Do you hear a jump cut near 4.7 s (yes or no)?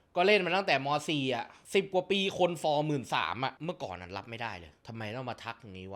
yes